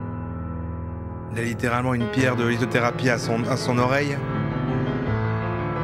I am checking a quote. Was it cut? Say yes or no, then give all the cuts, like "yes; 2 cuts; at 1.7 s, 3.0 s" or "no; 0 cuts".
no; 0 cuts